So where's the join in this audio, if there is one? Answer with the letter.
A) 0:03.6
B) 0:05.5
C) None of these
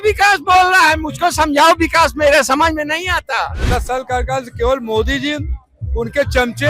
A